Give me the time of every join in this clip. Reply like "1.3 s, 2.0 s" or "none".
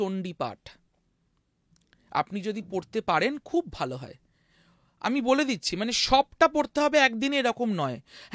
none